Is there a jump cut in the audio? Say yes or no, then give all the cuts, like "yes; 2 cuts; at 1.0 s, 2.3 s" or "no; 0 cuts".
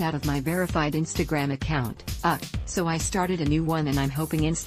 no; 0 cuts